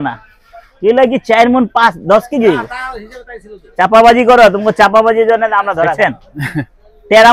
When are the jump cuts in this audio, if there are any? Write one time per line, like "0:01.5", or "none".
0:05.9